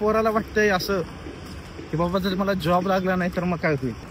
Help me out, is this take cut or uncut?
uncut